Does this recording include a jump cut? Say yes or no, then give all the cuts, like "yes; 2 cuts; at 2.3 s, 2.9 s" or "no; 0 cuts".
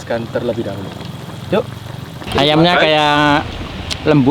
yes; 1 cut; at 2.2 s